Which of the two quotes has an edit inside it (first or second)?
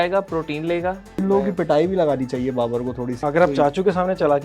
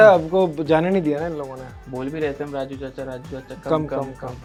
first